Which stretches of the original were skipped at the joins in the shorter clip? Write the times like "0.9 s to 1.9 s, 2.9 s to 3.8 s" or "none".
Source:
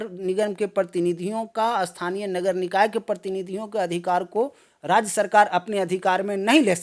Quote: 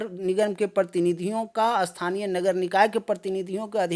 none

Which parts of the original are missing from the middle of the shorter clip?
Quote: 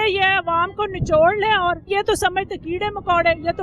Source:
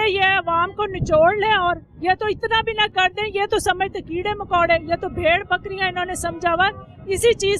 1.8 s to 3.3 s

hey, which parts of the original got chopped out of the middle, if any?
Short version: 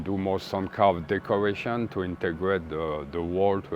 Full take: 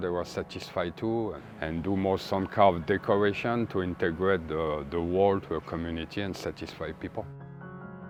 none

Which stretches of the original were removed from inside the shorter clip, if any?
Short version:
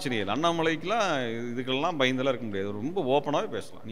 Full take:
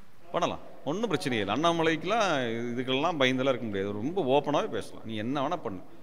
none

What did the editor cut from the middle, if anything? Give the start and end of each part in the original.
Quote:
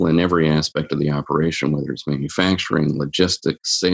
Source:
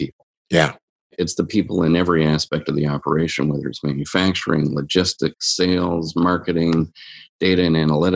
none

